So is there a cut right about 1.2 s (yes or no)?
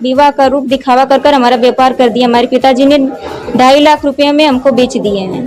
no